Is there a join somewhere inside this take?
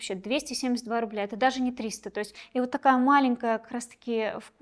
yes; 1 cut; at 2.4 s

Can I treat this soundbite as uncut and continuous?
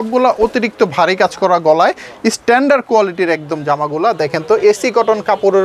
yes; 0 cuts

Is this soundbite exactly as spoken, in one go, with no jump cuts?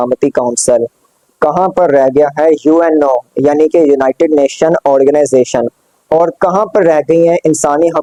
yes; 0 cuts

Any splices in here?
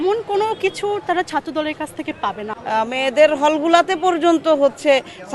yes; 1 cut; at 2.5 s

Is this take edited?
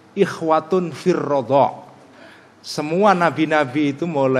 no; 0 cuts

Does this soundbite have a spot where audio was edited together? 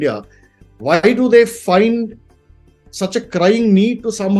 no; 0 cuts

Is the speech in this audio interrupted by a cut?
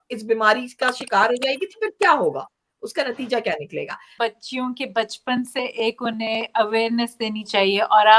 yes; 1 cut; at 4.1 s

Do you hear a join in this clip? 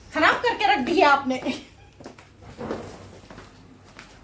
no; 0 cuts

